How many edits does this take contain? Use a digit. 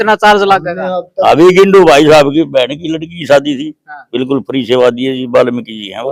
0